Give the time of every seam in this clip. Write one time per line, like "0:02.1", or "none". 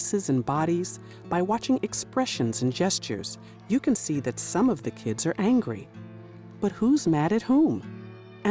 none